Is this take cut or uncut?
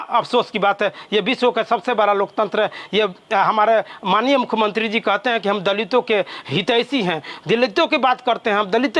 uncut